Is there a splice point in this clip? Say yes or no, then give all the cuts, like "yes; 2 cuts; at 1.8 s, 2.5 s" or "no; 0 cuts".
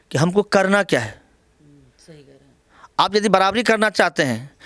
no; 0 cuts